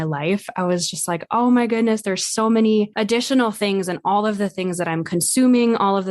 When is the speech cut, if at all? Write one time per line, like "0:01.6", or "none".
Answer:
0:02.9